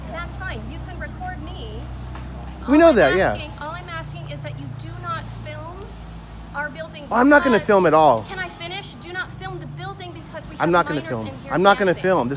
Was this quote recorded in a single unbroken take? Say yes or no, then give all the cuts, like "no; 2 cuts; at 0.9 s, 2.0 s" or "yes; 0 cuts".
yes; 0 cuts